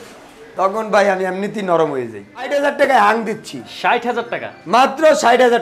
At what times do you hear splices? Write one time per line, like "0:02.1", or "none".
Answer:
0:02.5